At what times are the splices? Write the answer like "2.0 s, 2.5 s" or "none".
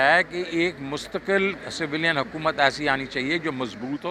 none